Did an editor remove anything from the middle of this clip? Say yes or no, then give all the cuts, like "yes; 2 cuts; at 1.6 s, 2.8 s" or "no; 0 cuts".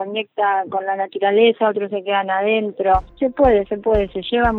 no; 0 cuts